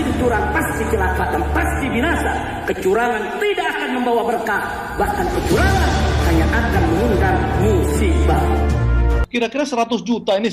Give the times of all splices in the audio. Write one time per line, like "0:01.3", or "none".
0:09.2